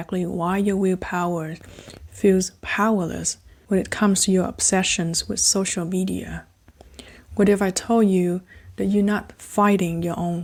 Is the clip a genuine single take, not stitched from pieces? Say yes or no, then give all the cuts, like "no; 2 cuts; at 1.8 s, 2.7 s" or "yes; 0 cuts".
yes; 0 cuts